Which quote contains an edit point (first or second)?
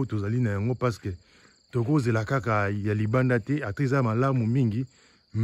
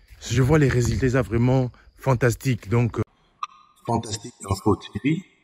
second